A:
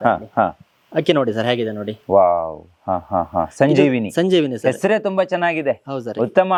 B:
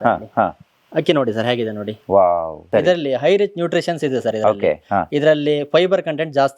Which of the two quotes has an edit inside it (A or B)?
B